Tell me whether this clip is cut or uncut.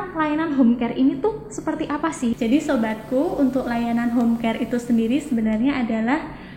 cut